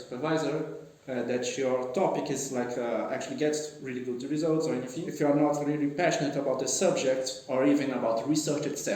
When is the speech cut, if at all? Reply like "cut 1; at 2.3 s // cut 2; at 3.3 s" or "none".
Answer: cut 1; at 5.0 s